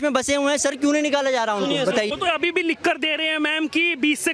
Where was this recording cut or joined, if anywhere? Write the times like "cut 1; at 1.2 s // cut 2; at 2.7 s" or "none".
cut 1; at 2.1 s